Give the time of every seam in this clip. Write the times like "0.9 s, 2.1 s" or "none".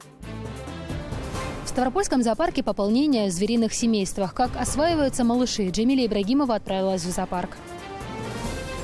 1.2 s, 7.5 s

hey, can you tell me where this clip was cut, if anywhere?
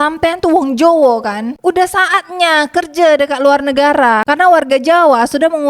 1.5 s

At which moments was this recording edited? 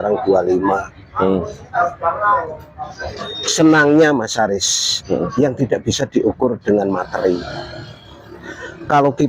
none

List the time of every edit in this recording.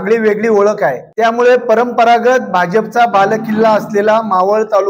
1.0 s

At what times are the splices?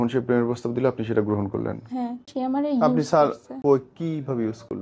2.3 s, 3.5 s

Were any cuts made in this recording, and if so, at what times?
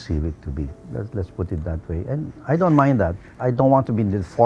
3.3 s

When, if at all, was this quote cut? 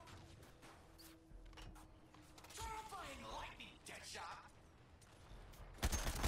none

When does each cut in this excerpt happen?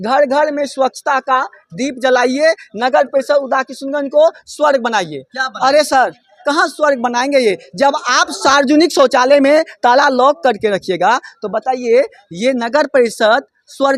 none

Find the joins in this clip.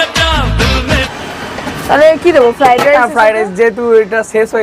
1.1 s

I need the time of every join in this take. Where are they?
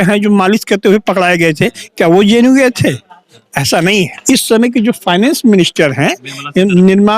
4.1 s

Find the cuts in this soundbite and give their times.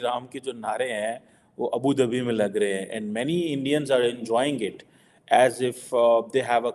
none

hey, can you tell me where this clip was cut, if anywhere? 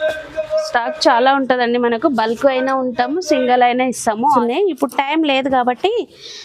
4.3 s

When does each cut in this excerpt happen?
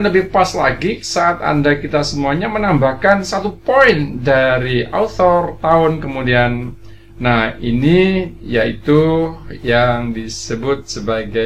none

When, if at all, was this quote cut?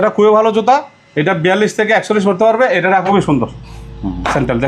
3.1 s

